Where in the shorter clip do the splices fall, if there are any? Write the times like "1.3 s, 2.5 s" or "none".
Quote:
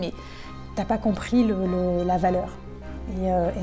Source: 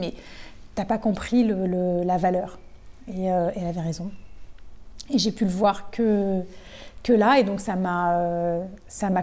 none

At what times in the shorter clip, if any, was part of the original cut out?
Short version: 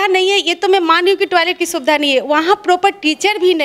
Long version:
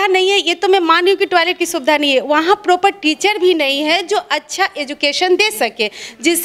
none

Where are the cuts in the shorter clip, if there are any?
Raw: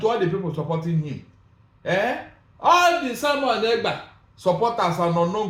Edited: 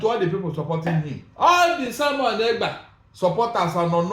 1.2 s

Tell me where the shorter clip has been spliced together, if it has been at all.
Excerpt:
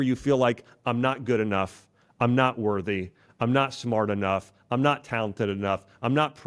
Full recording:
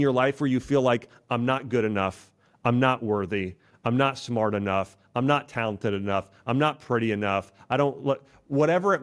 none

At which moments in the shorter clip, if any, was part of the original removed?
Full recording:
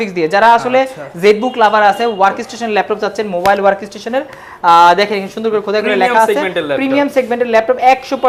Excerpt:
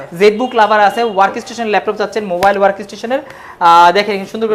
none

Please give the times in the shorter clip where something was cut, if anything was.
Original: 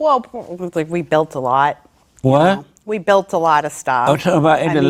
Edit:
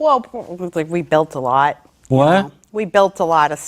1.9 s

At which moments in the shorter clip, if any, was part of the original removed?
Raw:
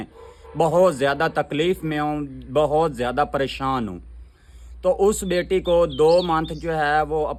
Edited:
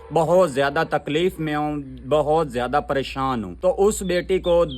3.5 s

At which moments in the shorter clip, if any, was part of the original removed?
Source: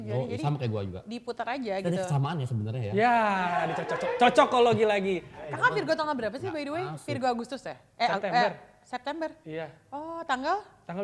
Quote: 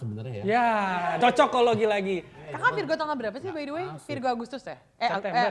1.2 s

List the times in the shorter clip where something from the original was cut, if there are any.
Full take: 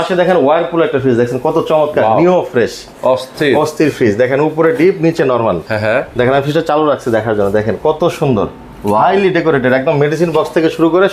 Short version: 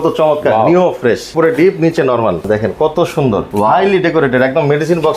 1.3 s, 2.5 s, 3.5 s

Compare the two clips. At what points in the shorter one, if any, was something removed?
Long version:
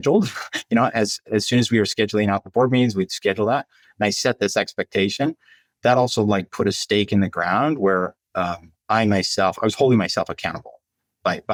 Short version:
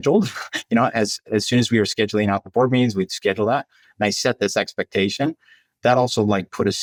none

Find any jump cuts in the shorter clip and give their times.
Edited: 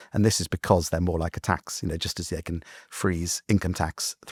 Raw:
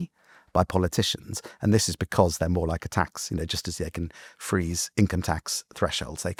none

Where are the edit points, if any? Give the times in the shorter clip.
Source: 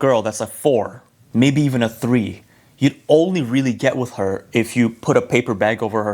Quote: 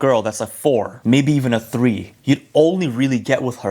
0.9 s, 2.1 s

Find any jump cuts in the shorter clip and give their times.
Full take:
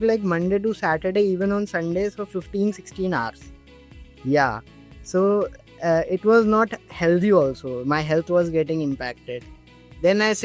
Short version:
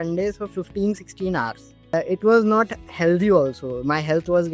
1.9 s

